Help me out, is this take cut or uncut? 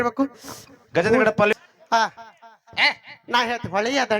cut